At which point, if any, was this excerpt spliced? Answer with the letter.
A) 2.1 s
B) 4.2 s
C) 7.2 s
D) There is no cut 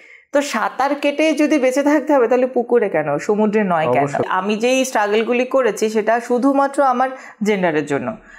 B